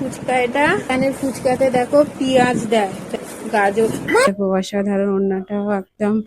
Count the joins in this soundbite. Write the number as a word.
three